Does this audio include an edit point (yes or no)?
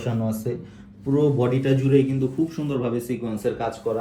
no